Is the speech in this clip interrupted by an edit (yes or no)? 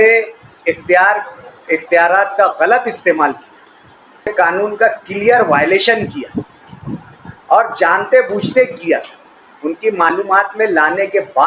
yes